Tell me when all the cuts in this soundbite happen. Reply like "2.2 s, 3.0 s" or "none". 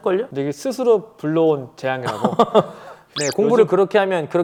none